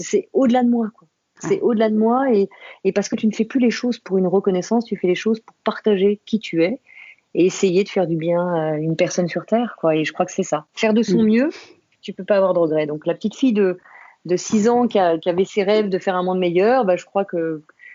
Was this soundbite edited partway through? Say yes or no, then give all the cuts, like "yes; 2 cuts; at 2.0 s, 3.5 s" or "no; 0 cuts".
no; 0 cuts